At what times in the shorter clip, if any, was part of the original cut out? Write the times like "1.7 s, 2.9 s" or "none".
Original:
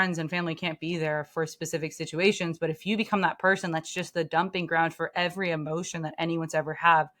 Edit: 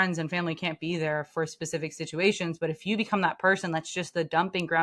none